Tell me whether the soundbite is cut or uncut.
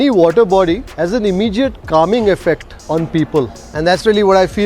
cut